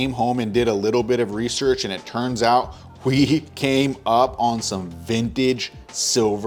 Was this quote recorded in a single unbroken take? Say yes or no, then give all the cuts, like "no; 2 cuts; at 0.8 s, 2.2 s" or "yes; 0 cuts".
yes; 0 cuts